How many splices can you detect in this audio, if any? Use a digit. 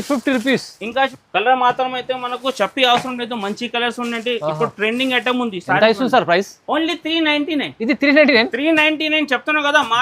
1